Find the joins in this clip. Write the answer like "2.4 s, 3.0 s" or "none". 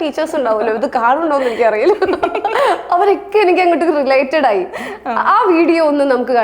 none